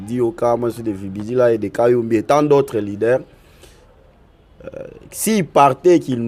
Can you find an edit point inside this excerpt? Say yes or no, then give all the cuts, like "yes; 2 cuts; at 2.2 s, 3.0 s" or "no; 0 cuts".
no; 0 cuts